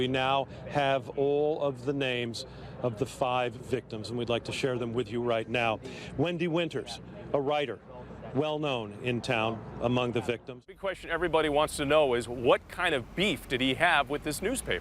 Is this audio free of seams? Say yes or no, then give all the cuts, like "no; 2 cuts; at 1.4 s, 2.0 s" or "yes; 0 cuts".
no; 1 cut; at 10.8 s